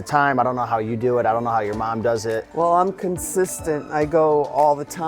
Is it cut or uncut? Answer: cut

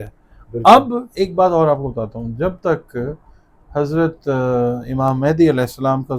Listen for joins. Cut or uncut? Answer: cut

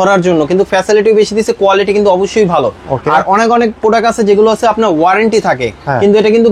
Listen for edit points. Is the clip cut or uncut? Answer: uncut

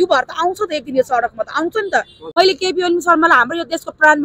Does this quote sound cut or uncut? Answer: cut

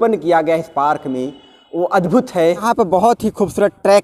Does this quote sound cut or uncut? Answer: cut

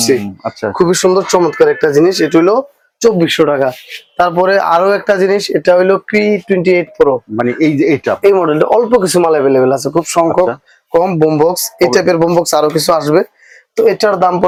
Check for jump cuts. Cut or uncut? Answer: uncut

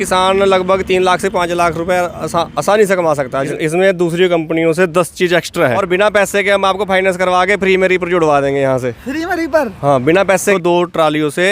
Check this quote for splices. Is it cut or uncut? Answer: cut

